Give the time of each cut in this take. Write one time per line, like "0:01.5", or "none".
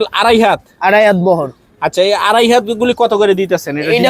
none